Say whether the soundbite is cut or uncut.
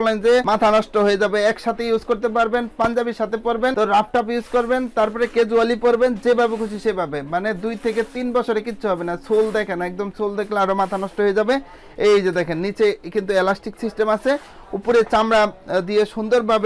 uncut